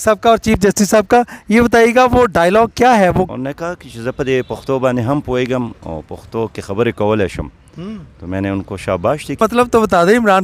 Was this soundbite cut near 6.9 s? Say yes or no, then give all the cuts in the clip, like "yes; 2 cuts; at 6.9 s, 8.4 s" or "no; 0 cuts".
no; 2 cuts; at 3.3 s, 9.4 s